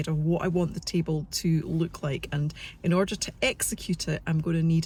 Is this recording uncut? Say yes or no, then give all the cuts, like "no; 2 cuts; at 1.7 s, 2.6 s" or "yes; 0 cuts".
yes; 0 cuts